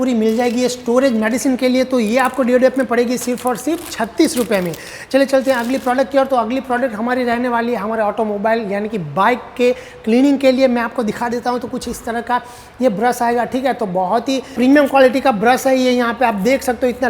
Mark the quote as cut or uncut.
uncut